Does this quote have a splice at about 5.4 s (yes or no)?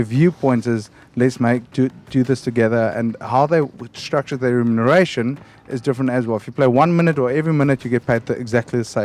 no